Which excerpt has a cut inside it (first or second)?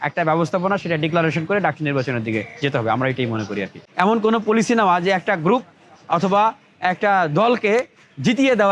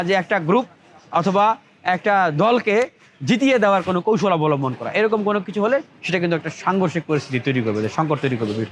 first